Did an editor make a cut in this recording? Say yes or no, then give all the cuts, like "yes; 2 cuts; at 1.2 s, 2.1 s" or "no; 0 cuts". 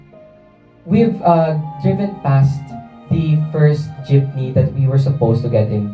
no; 0 cuts